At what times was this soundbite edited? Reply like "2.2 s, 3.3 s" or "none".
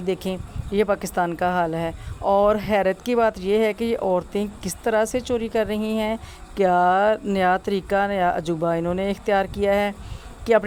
none